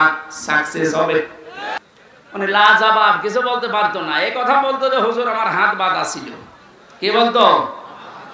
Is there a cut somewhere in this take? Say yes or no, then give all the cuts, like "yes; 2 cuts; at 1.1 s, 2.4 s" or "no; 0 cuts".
yes; 1 cut; at 1.8 s